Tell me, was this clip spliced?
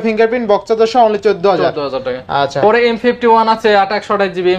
no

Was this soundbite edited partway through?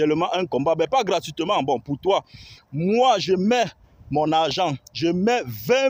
no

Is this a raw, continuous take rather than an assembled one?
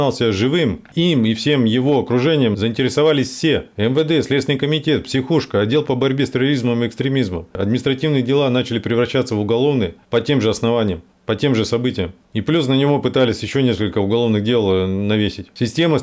no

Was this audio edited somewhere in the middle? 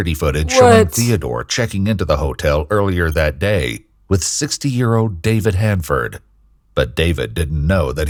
no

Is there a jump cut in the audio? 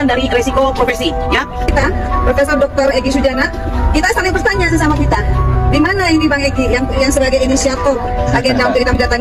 no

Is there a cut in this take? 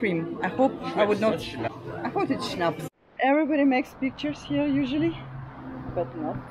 yes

